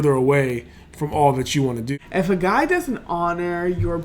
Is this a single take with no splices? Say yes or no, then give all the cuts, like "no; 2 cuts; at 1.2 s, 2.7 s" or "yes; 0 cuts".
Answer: no; 1 cut; at 1.9 s